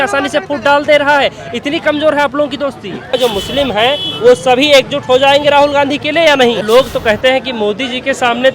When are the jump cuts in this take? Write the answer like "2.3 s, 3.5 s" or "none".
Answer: 3.2 s, 6.6 s

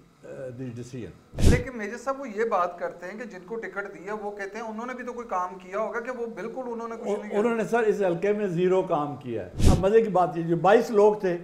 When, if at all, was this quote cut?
1.4 s, 9.6 s

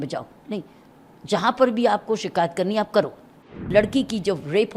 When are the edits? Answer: 3.5 s

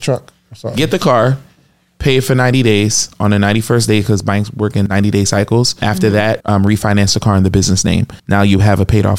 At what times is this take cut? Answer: 4.9 s, 6.2 s, 8.1 s

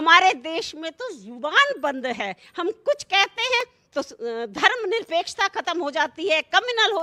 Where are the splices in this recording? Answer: none

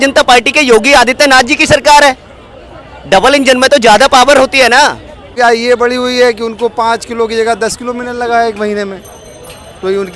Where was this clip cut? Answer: 5.3 s

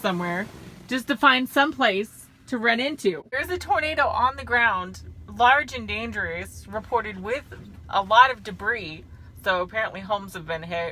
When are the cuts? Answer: 3.4 s

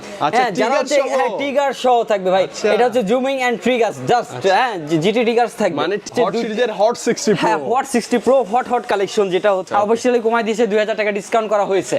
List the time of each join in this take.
6.1 s, 9.7 s

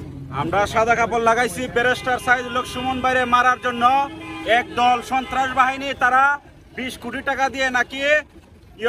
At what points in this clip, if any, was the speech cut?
none

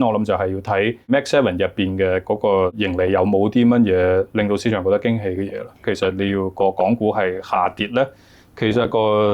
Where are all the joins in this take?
1.1 s, 2.8 s, 5.9 s

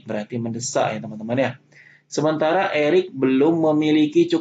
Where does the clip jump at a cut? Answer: none

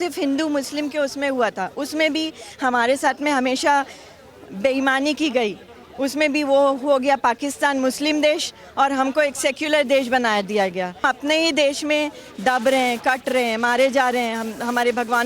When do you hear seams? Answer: 11.0 s

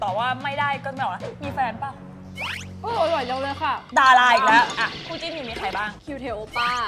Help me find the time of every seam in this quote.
4.8 s

